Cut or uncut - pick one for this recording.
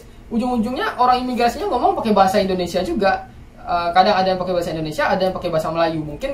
uncut